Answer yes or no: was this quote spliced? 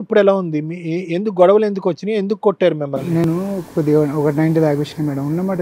no